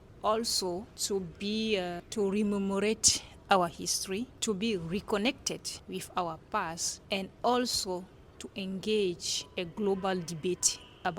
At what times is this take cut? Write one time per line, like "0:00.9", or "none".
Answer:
0:00.9
0:02.0
0:04.3
0:05.7
0:06.9